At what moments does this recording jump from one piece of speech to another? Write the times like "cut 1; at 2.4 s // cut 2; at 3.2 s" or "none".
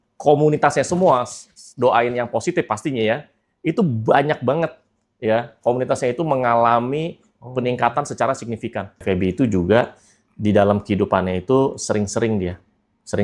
cut 1; at 8.9 s